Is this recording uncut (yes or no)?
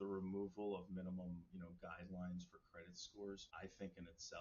no